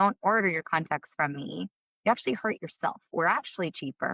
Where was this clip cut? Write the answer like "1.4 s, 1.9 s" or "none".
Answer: 3.1 s